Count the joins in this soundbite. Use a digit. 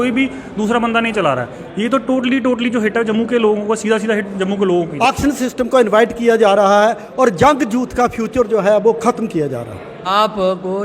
2